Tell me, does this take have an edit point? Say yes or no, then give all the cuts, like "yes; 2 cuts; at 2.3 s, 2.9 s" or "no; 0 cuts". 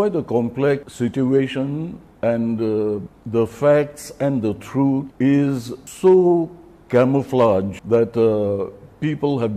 yes; 6 cuts; at 0.9 s, 2.0 s, 3.1 s, 5.1 s, 5.8 s, 7.8 s